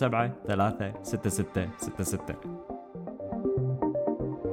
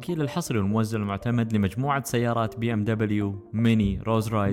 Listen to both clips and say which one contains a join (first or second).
first